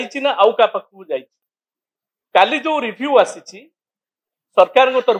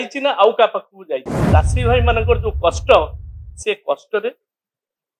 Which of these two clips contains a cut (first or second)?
second